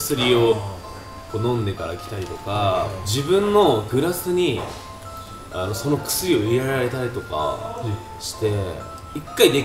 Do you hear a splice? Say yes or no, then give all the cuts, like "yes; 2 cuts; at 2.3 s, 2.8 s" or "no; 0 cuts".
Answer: no; 0 cuts